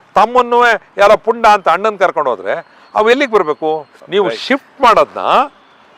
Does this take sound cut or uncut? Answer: uncut